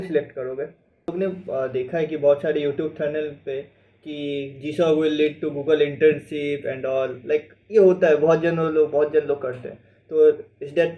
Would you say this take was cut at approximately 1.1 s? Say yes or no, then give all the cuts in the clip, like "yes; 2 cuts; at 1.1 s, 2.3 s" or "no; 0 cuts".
yes; 1 cut; at 1.1 s